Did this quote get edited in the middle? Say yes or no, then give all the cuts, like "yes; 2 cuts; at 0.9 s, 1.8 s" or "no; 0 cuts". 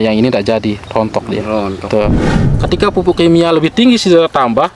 yes; 1 cut; at 2.3 s